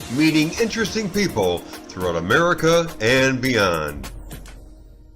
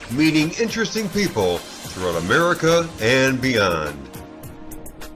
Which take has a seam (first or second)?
first